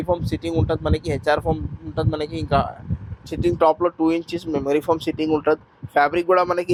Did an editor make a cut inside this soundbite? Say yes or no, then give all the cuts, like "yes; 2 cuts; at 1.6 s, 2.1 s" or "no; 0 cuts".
no; 0 cuts